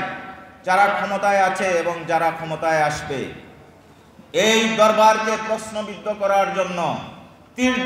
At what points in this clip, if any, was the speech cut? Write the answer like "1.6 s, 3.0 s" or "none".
none